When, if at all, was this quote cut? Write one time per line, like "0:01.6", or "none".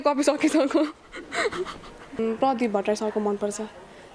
0:02.2